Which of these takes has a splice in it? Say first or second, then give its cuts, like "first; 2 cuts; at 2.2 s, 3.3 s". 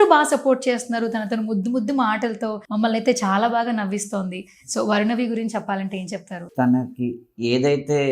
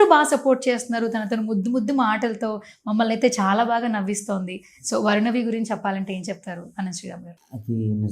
first; 2 cuts; at 2.6 s, 6.4 s